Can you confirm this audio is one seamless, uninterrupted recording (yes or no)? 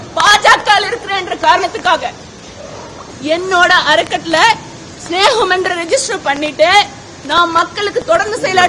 no